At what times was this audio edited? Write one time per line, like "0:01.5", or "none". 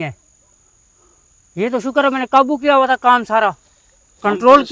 none